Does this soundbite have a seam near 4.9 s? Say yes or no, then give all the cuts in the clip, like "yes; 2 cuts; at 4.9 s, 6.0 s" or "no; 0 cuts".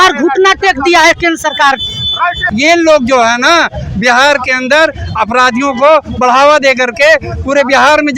no; 1 cut; at 2.4 s